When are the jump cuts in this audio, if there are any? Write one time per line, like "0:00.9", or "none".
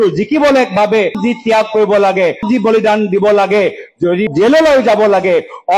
0:01.2
0:02.4
0:04.3

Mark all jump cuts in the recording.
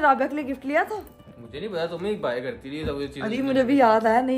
none

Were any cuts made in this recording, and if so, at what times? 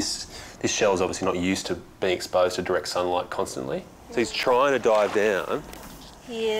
0:04.0

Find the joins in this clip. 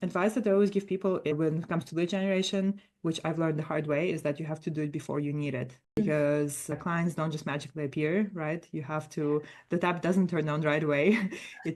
0:06.0

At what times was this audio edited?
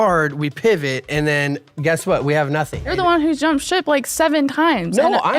0:02.9

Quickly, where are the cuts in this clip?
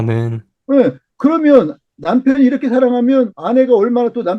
0:03.4

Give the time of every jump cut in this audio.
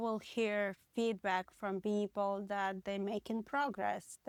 none

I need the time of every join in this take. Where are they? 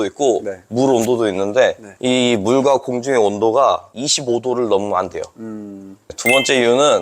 0:06.1

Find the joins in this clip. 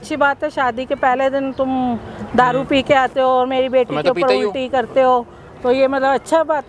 none

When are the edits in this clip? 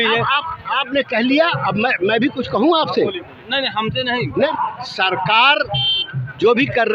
0:04.5

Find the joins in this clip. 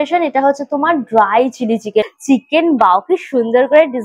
0:02.1

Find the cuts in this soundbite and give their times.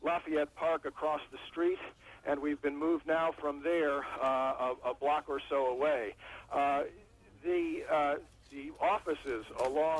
0:05.3

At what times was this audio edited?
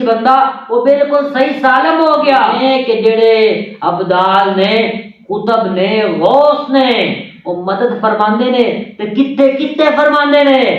0:02.6

